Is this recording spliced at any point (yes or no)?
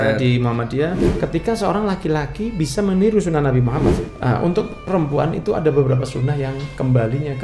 yes